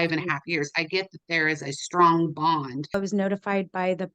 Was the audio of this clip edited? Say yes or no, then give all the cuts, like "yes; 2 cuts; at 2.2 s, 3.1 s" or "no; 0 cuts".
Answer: yes; 1 cut; at 2.9 s